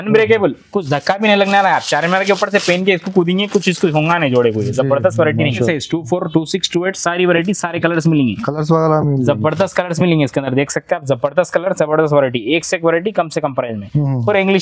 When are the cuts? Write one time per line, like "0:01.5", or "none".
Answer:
0:05.7